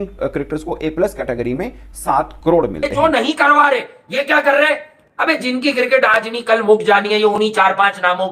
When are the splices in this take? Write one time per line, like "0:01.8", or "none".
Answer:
0:02.9